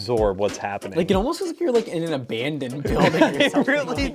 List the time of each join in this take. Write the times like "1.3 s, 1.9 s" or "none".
none